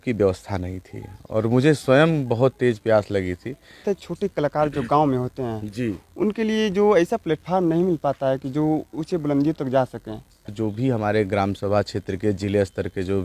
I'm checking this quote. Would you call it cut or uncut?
cut